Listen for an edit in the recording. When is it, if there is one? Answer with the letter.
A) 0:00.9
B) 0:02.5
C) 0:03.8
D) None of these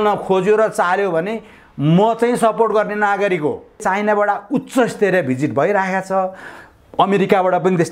C